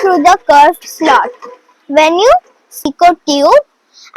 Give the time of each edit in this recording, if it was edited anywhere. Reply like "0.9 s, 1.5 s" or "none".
2.8 s